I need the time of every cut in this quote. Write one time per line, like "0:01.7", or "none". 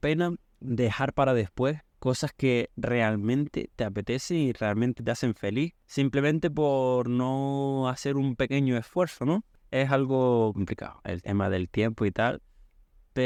none